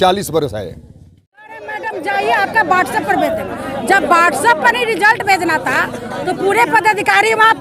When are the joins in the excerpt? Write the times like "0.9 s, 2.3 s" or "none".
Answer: 1.4 s